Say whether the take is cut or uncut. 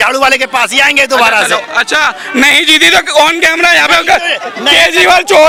uncut